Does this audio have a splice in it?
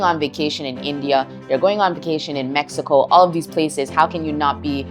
no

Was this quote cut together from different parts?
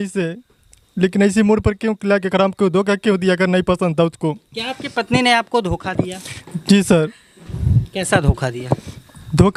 no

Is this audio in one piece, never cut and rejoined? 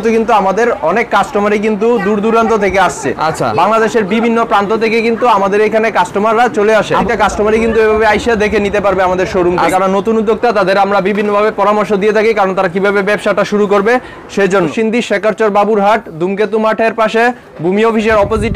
no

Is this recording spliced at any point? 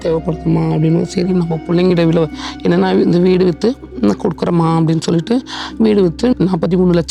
no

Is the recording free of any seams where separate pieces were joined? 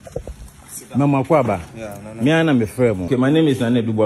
no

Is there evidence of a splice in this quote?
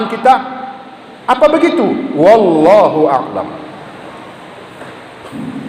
no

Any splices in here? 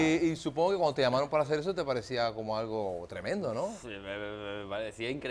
no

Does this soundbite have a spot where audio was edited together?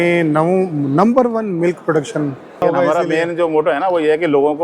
yes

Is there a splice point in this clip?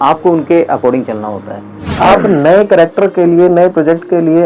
yes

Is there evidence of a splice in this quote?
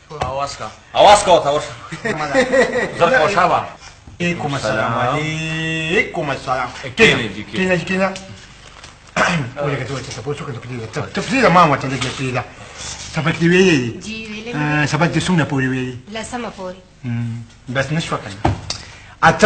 yes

